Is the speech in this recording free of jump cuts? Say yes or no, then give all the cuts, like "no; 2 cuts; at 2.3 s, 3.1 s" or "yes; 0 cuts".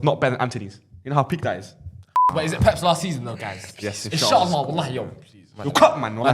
no; 1 cut; at 2.3 s